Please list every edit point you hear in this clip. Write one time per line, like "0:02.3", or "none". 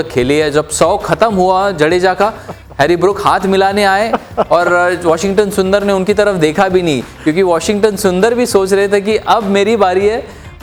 none